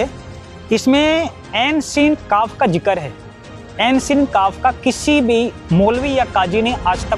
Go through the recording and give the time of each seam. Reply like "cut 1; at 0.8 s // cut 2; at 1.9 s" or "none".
cut 1; at 1.4 s